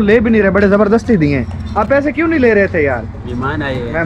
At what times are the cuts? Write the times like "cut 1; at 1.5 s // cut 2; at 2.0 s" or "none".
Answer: none